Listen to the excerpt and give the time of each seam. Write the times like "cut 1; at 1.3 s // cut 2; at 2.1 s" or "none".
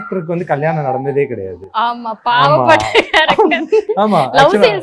none